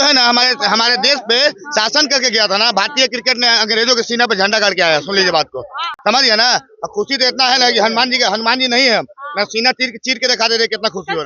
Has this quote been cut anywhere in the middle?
no; 0 cuts

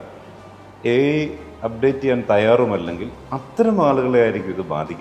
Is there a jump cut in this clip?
no; 0 cuts

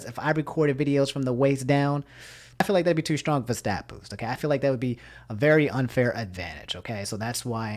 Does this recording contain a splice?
yes; 1 cut; at 2.6 s

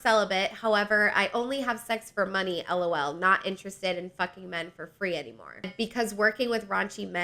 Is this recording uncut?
no; 1 cut; at 5.7 s

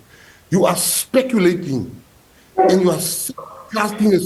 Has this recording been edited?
no; 0 cuts

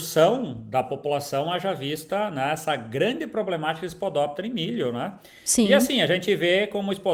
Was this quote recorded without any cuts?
yes; 0 cuts

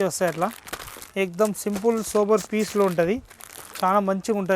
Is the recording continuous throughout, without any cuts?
yes; 0 cuts

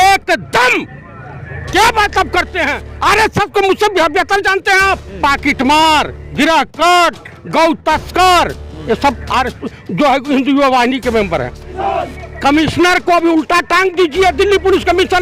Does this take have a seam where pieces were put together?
yes; 2 cuts; at 5.1 s, 11.7 s

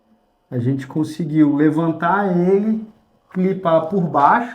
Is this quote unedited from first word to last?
yes; 0 cuts

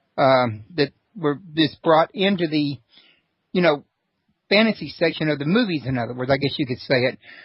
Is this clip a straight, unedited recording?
no; 1 cut; at 3.7 s

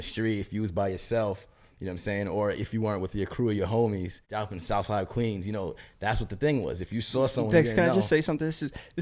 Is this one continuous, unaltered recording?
no; 1 cut; at 4.2 s

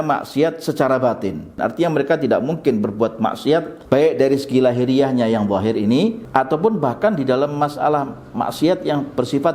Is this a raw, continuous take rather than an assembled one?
no; 3 cuts; at 1.5 s, 3.8 s, 6.2 s

